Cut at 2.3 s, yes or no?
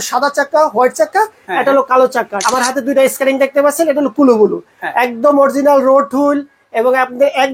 yes